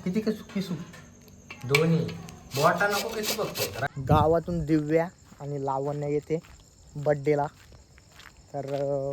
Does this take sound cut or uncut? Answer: cut